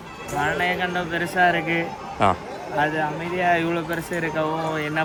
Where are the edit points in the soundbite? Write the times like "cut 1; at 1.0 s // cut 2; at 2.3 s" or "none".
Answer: none